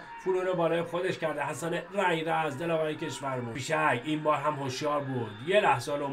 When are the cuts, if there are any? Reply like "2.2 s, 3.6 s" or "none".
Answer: 3.6 s